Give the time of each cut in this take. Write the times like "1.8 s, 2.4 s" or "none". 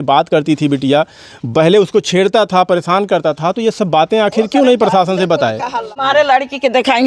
5.9 s